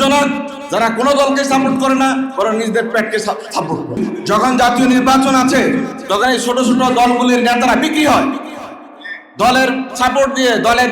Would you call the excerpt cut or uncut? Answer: cut